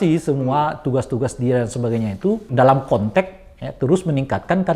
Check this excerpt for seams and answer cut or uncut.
cut